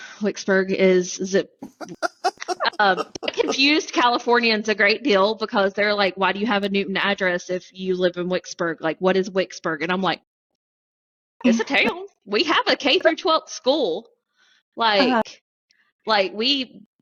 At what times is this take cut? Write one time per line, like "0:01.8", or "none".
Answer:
none